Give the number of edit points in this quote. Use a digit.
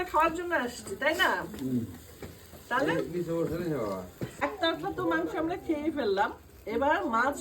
1